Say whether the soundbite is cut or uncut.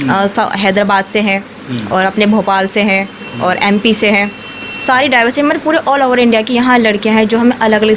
uncut